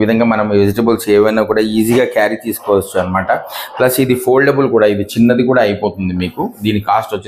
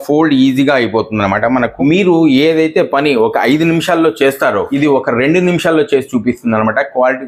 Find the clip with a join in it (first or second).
second